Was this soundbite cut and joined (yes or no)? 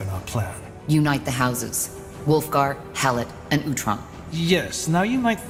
no